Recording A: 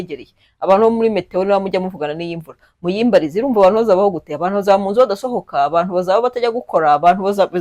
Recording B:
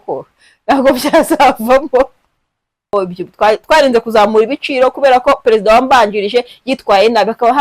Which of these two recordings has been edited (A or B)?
B